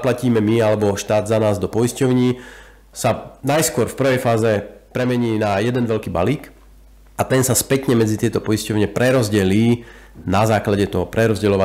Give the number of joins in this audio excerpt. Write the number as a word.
two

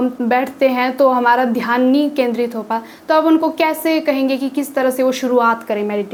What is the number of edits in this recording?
zero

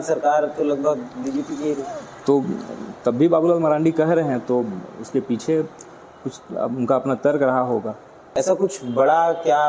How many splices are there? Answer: one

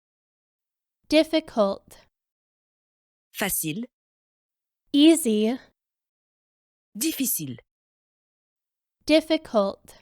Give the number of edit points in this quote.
one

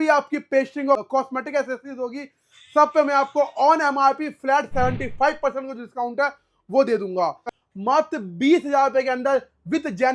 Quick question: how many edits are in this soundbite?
one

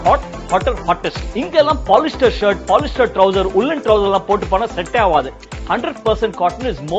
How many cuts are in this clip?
one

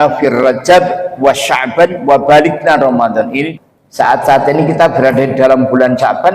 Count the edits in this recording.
one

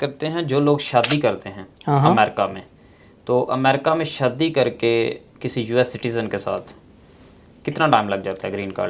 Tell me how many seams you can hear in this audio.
zero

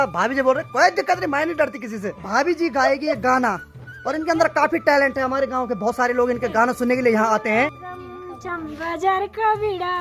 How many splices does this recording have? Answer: two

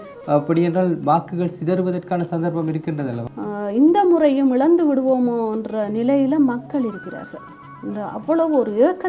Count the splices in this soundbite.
one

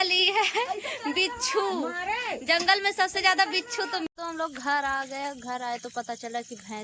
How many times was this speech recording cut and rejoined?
one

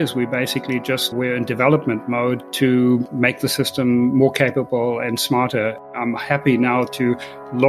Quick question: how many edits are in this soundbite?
four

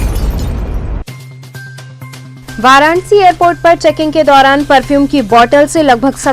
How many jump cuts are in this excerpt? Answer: one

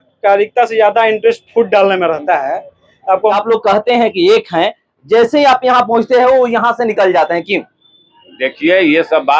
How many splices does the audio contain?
one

